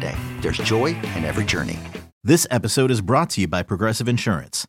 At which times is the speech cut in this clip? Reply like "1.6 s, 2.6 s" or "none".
2.1 s